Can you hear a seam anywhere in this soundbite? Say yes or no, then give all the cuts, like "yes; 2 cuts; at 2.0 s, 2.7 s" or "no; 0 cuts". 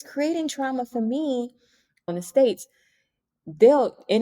yes; 1 cut; at 2.1 s